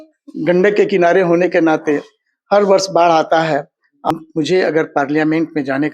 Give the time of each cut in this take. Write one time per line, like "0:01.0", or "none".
0:04.1